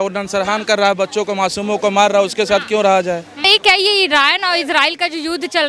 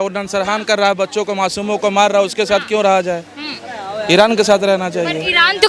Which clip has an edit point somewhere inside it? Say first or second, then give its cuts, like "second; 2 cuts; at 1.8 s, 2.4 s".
first; 1 cut; at 3.4 s